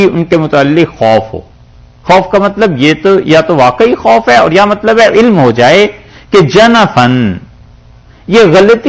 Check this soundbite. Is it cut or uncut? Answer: uncut